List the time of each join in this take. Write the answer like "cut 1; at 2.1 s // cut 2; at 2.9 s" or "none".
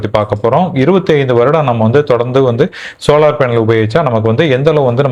none